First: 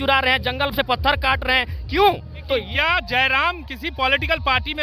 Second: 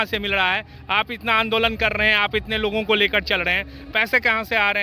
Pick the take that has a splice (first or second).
first